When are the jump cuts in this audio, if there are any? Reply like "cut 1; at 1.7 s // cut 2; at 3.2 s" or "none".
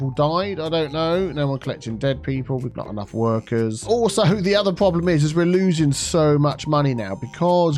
cut 1; at 2.8 s // cut 2; at 3.8 s